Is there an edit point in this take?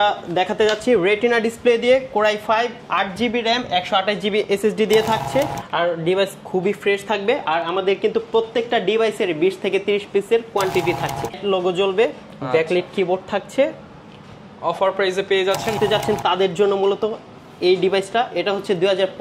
yes; 3 cuts; at 5.6 s, 11.4 s, 15.8 s

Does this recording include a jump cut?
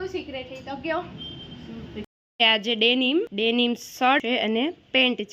yes; 3 cuts; at 2.1 s, 3.3 s, 4.2 s

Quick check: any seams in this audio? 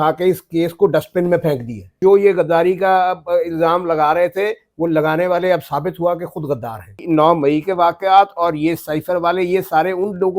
yes; 2 cuts; at 1.9 s, 7.0 s

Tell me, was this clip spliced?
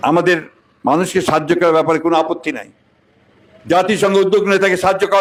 no; 0 cuts

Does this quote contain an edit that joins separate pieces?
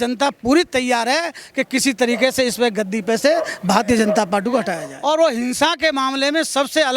yes; 1 cut; at 4.8 s

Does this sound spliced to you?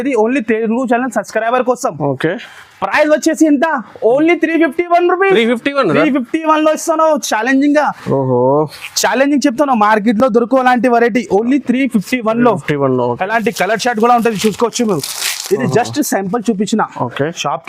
no; 0 cuts

